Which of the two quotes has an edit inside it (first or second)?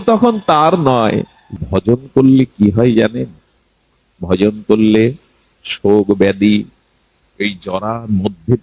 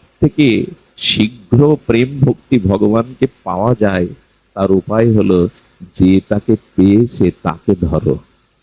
first